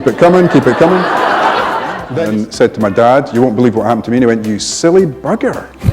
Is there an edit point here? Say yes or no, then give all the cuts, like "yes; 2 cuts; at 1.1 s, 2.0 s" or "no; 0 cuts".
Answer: yes; 1 cut; at 2.0 s